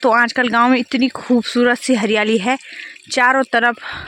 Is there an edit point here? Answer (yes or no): no